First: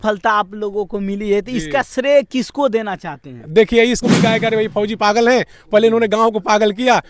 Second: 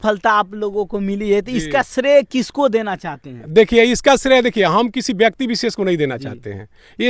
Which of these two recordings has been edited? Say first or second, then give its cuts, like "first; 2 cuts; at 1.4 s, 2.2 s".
first; 1 cut; at 4.0 s